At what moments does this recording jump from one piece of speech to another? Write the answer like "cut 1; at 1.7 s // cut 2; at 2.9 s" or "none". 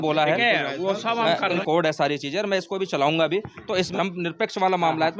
cut 1; at 1.6 s // cut 2; at 3.9 s